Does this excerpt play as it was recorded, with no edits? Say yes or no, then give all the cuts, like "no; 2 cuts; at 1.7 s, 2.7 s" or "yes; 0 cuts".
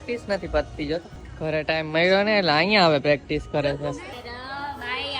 no; 2 cuts; at 1.2 s, 4.1 s